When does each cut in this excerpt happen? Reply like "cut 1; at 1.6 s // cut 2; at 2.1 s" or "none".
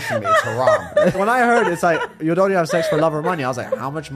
cut 1; at 1.1 s